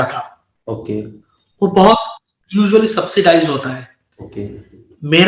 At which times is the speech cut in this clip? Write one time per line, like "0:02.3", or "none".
none